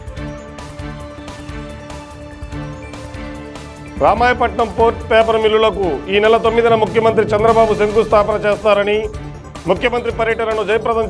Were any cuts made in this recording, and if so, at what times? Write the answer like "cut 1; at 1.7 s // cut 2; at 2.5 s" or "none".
none